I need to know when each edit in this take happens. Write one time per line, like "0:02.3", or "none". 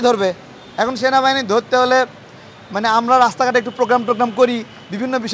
none